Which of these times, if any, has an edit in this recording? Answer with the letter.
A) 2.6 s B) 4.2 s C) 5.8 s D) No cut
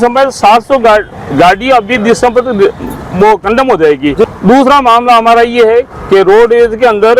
B